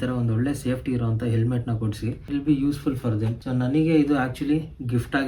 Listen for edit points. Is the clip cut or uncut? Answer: cut